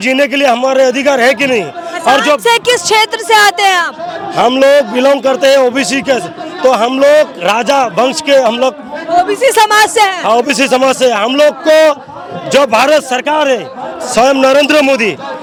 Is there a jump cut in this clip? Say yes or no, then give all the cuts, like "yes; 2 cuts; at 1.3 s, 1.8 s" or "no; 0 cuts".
no; 0 cuts